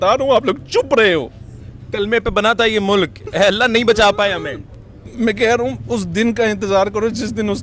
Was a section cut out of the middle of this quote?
no; 0 cuts

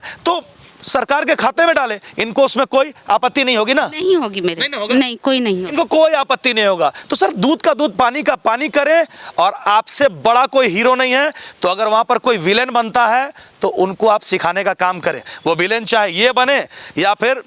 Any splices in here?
no; 0 cuts

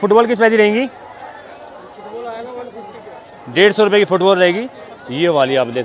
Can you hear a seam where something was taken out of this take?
no; 0 cuts

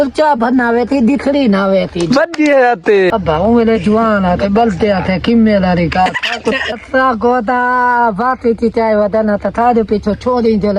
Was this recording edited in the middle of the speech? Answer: yes; 2 cuts; at 3.1 s, 6.7 s

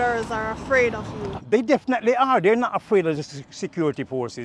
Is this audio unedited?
yes; 0 cuts

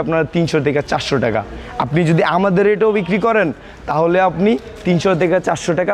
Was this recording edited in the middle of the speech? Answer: no; 0 cuts

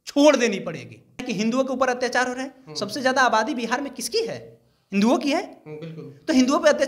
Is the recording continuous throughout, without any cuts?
no; 1 cut; at 1.3 s

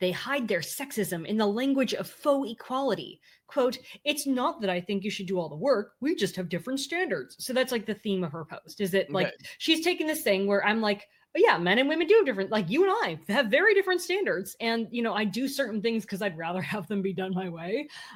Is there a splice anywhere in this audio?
no; 0 cuts

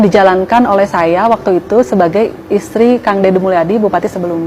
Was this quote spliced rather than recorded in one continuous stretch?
no; 0 cuts

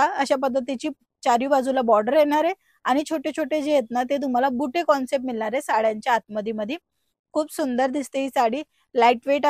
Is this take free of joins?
yes; 0 cuts

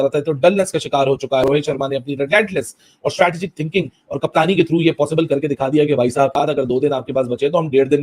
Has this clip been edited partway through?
yes; 2 cuts; at 1.4 s, 6.3 s

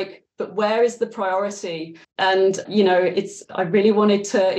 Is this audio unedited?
no; 2 cuts; at 2.4 s, 3.4 s

